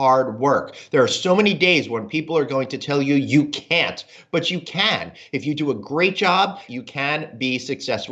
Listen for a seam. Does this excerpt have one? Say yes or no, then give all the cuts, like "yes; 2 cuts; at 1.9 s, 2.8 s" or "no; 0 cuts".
yes; 1 cut; at 6.6 s